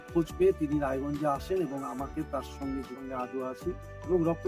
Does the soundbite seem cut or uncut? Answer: cut